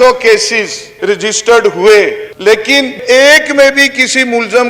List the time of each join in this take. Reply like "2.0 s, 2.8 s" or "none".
0.9 s, 3.0 s